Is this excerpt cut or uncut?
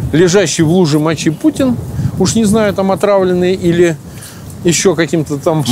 uncut